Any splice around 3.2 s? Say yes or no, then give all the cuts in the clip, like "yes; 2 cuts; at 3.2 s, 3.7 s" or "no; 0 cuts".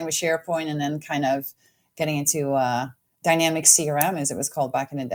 no; 0 cuts